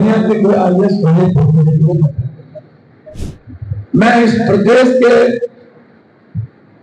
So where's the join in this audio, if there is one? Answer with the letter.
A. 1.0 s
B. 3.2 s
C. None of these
B